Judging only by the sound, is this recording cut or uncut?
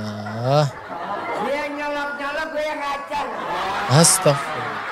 uncut